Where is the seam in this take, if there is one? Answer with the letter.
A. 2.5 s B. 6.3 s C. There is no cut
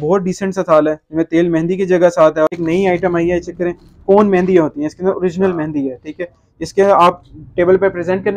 A